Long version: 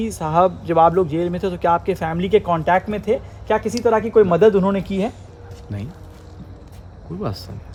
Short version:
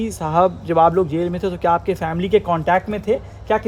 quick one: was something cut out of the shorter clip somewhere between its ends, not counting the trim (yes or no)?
no